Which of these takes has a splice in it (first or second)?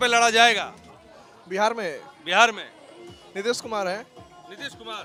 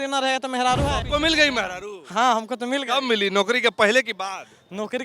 second